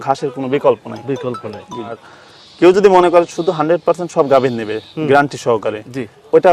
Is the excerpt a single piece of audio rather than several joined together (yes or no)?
no